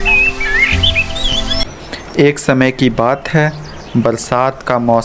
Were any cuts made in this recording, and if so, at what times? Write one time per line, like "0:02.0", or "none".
0:01.0